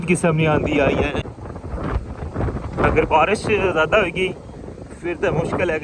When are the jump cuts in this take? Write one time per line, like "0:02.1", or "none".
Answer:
0:01.3